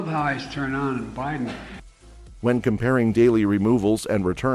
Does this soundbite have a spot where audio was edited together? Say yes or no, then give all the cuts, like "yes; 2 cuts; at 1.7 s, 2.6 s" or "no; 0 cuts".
no; 0 cuts